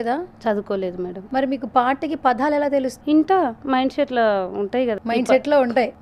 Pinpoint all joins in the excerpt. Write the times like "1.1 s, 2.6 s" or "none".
1.2 s, 2.9 s, 5.0 s